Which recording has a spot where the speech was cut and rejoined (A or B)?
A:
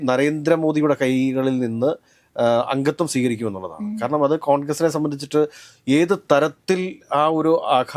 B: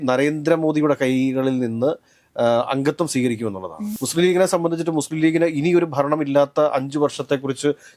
B